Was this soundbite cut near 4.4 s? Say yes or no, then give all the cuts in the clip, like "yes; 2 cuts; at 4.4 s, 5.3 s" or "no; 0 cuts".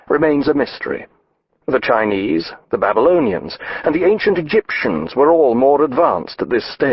yes; 1 cut; at 4.4 s